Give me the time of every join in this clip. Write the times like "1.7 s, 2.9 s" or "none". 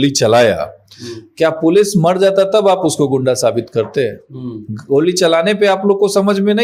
none

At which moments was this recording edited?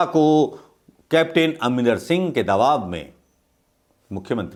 none

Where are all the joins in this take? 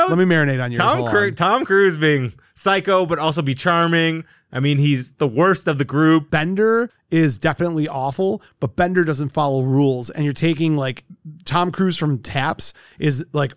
6.3 s

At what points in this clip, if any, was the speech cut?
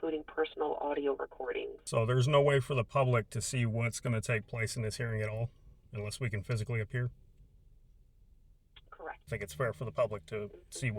1.8 s, 9.3 s

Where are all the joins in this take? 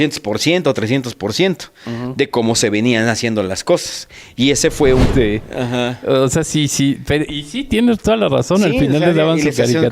5.1 s

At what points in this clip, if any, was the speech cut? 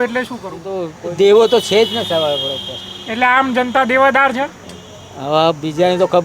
0.9 s

